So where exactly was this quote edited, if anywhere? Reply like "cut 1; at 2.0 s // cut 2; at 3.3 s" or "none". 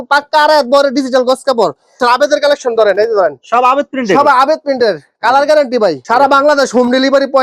cut 1; at 1.9 s // cut 2; at 6.0 s